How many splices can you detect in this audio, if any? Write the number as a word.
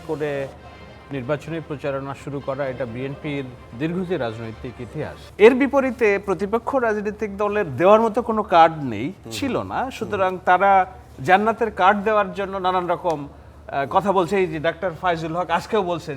one